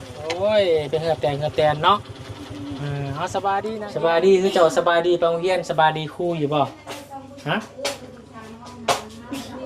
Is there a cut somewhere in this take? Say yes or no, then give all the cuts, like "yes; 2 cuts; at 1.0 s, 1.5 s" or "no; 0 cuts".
yes; 1 cut; at 3.8 s